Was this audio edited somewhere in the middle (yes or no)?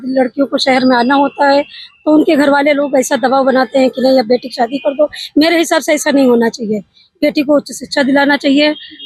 no